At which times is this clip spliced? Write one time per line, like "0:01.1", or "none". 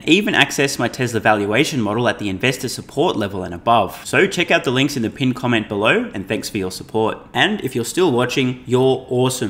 none